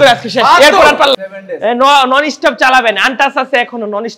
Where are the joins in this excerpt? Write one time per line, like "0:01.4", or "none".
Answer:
0:01.1